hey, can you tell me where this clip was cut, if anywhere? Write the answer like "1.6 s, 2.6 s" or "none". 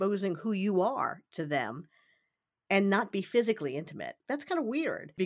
3.1 s, 4.1 s